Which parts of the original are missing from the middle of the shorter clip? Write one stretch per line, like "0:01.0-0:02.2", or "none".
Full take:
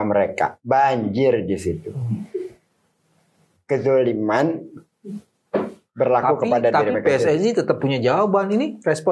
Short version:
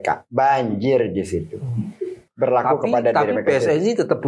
0:02.6-0:05.8